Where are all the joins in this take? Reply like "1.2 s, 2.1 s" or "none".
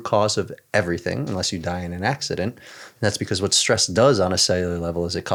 none